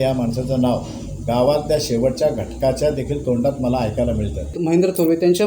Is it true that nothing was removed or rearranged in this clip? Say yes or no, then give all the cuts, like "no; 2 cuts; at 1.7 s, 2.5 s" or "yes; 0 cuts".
no; 1 cut; at 4.6 s